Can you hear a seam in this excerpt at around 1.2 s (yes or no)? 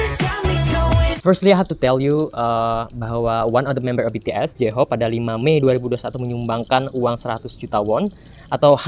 yes